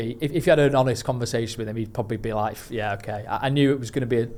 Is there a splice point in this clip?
no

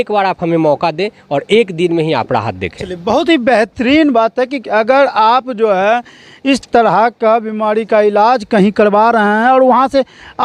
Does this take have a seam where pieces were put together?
no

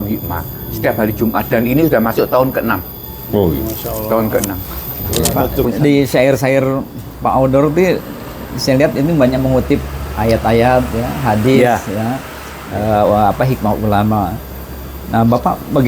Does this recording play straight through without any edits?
no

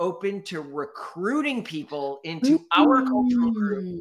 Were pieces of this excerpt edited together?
no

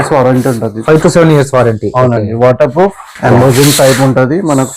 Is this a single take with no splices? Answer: no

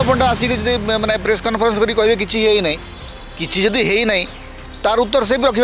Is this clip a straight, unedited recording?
yes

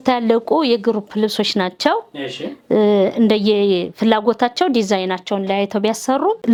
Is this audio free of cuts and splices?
yes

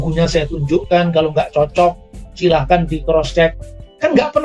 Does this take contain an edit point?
no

